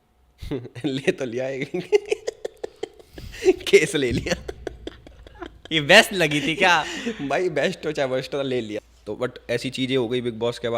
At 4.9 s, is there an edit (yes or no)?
no